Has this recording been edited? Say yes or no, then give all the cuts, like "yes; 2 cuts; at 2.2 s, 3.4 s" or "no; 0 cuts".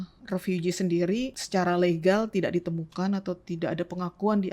yes; 1 cut; at 1.4 s